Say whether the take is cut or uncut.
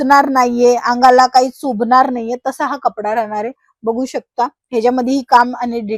uncut